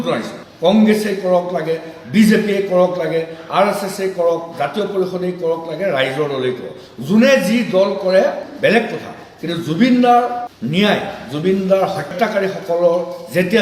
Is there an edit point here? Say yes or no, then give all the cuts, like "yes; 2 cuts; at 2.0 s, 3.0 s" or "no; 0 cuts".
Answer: no; 0 cuts